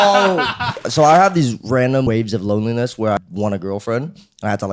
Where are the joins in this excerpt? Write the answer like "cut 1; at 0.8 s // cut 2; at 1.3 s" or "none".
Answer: cut 1; at 0.8 s // cut 2; at 2.0 s // cut 3; at 3.2 s